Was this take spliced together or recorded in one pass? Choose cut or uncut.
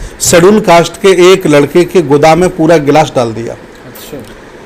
uncut